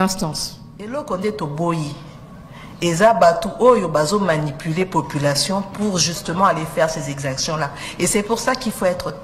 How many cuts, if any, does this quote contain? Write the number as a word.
one